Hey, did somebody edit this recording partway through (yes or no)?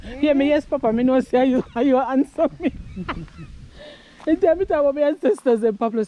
no